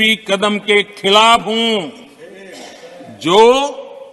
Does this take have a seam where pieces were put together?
no; 0 cuts

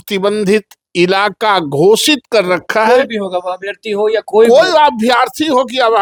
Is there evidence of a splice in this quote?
no; 0 cuts

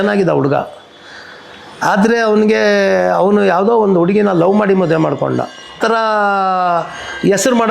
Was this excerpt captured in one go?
no; 1 cut; at 5.8 s

